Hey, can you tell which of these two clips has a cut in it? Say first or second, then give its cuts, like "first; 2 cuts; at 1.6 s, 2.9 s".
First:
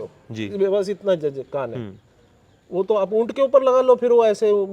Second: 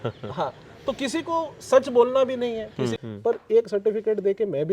second; 1 cut; at 2.9 s